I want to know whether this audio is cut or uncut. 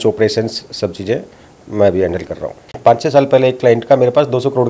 cut